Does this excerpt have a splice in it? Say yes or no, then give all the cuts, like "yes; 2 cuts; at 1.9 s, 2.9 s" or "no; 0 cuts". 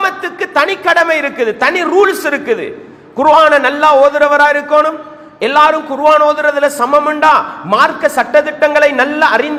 no; 0 cuts